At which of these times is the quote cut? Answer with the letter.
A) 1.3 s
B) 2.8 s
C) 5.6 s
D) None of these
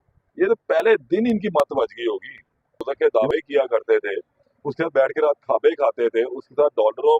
B